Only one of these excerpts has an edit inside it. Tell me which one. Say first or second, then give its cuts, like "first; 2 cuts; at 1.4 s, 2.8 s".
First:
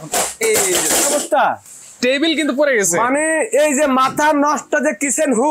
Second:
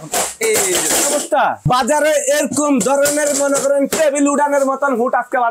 second; 1 cut; at 1.6 s